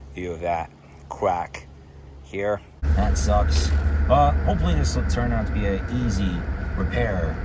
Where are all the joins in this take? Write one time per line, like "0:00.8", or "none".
none

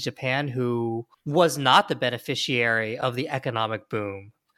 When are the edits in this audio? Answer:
0:01.1

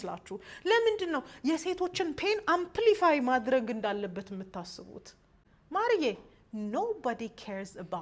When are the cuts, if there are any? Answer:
0:05.2

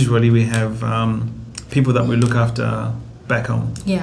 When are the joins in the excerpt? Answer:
none

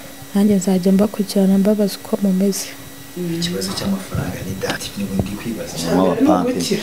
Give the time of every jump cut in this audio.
0:04.8

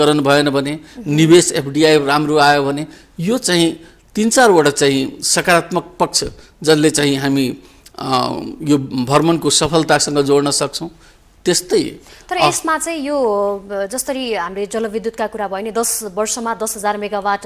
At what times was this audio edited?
none

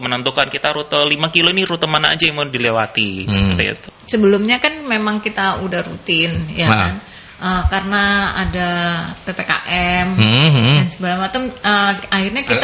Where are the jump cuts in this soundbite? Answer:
0:03.8

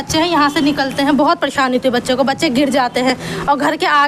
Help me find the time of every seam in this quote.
none

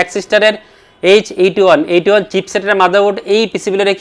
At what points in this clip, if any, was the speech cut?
none

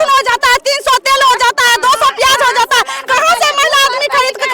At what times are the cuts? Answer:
none

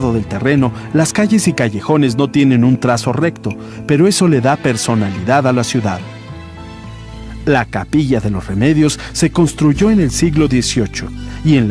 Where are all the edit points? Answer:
0:04.5

